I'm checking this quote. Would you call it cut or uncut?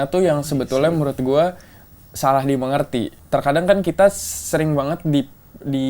cut